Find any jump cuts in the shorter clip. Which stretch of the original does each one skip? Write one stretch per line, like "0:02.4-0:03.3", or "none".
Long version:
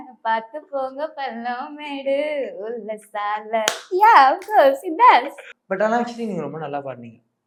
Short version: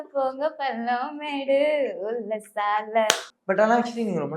0:03.8-0:05.4

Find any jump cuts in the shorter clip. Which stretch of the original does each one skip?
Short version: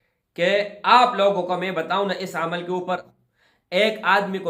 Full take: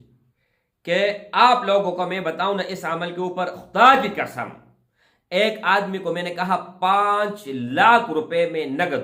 0:03.6-0:04.7

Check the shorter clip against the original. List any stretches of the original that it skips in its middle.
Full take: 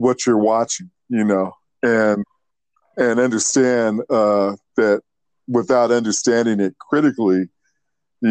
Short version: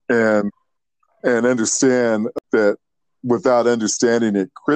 0:04.1-0:04.6

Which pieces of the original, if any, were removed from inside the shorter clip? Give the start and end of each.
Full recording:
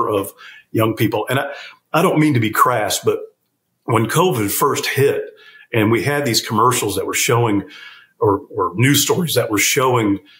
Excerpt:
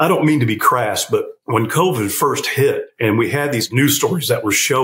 0:03.3-0:03.8
0:05.7-0:08.4

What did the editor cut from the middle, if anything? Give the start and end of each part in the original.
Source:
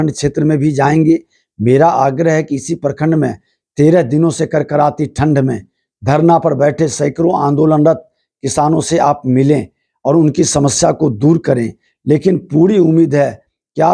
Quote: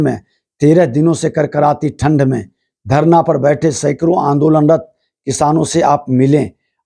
none

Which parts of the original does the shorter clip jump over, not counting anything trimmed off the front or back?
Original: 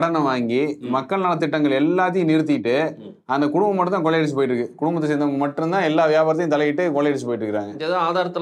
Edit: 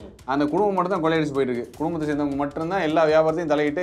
none

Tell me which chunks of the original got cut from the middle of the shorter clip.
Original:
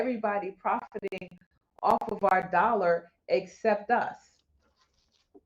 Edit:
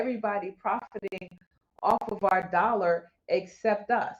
none

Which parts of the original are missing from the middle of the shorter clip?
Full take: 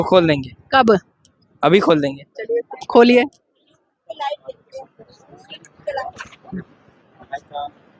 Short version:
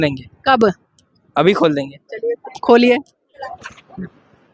0:03.7-0:05.9

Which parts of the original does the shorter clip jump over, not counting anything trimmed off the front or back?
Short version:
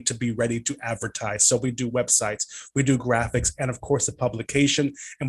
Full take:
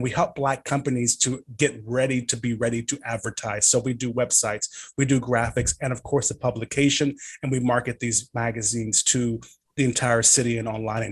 none

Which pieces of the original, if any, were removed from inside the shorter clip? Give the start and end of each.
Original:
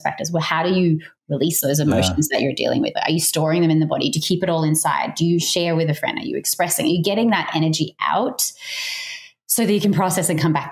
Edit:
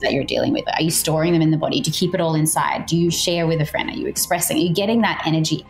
none

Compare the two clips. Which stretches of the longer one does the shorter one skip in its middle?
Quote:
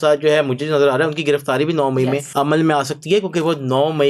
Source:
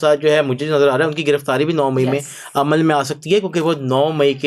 0:02.3-0:02.5

